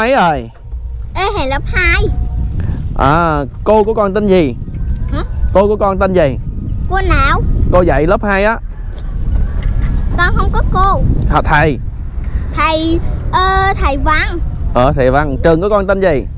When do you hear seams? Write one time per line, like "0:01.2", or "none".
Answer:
none